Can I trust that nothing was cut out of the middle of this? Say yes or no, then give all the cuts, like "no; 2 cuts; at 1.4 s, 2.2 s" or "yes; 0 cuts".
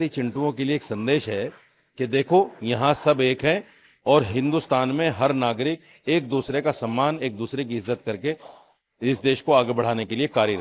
yes; 0 cuts